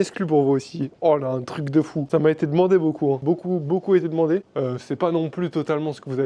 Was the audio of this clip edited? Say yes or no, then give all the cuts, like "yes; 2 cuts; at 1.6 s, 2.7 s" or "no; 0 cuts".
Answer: no; 0 cuts